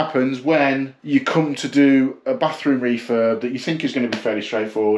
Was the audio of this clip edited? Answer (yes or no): yes